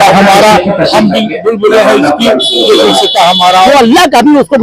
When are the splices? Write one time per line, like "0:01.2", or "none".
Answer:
0:03.7